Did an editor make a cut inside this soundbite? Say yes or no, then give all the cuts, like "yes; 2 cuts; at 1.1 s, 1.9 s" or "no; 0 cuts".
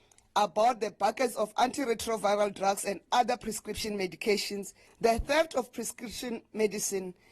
yes; 1 cut; at 4.8 s